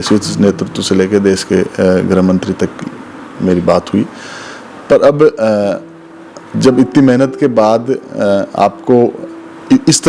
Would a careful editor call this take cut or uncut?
uncut